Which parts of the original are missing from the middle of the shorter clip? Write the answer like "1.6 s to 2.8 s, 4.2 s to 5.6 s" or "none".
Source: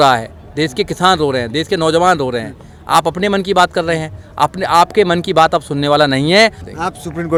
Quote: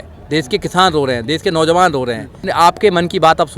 2.7 s to 4.6 s

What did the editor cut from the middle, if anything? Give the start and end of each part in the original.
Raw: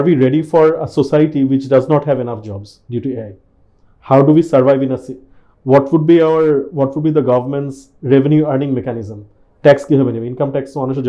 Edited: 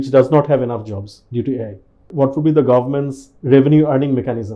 3.7 s to 6.7 s

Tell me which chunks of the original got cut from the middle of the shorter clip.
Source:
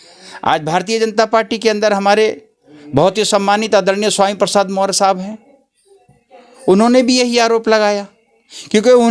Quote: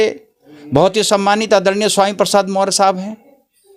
none

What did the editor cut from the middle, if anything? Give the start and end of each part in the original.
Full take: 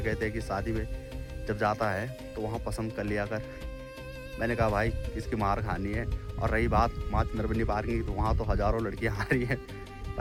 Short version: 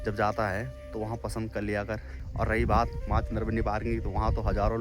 3.6 s to 6.2 s

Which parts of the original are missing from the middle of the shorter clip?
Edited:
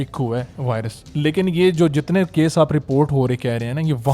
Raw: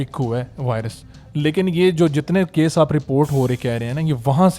1.0 s to 1.2 s

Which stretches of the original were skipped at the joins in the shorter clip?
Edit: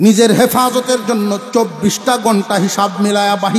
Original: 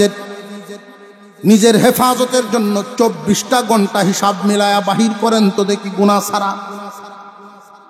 none

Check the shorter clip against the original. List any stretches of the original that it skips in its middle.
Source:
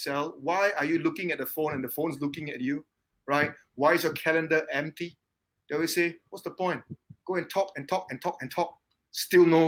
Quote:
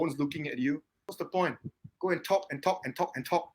3.1 s to 6.3 s

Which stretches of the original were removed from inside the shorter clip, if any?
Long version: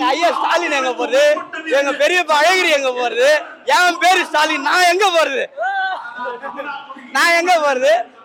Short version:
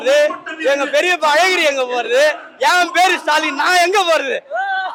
none

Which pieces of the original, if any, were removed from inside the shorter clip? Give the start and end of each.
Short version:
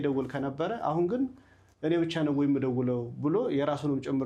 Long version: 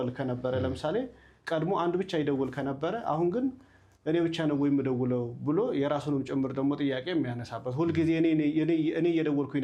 none

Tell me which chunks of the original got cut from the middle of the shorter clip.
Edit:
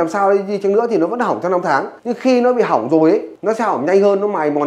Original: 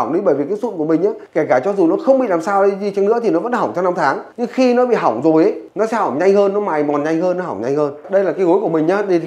none

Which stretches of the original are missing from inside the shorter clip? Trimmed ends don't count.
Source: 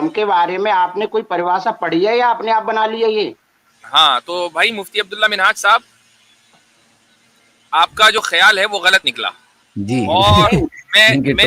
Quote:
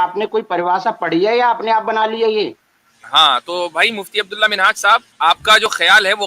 5.9 s to 7.6 s

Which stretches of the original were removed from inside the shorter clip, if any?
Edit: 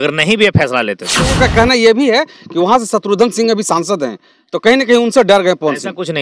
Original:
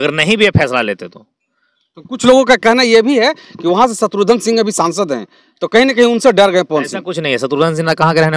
1.4 s to 2.4 s

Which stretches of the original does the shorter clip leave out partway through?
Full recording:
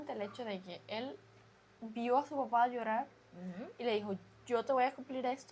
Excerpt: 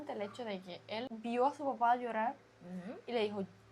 1.1 s to 1.8 s

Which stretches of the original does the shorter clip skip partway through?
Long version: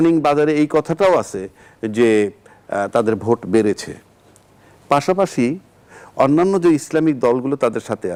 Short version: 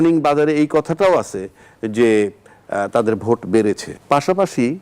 3.9 s to 4.7 s

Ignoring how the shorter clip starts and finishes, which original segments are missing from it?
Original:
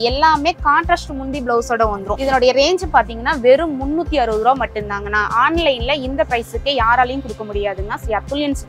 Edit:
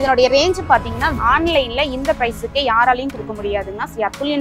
3.4 s to 5.2 s

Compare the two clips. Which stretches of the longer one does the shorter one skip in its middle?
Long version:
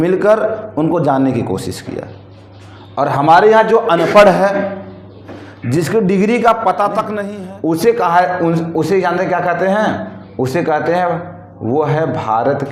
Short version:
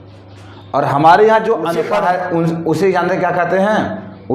4.0 s to 7.9 s

